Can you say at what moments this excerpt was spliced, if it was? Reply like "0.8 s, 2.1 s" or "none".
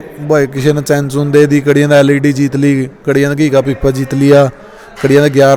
none